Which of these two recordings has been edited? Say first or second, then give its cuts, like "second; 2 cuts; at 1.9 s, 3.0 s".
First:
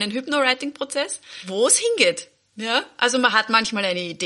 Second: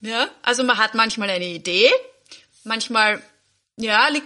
first; 1 cut; at 1.4 s